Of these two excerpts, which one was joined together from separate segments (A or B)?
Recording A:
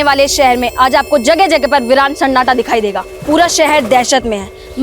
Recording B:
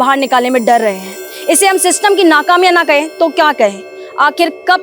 A